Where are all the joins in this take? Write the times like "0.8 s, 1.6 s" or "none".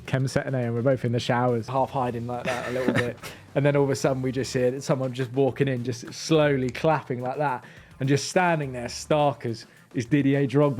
1.7 s